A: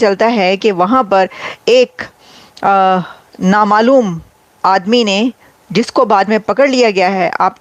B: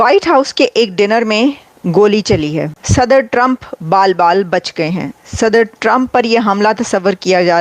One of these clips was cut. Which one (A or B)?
B